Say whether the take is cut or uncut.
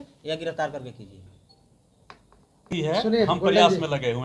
uncut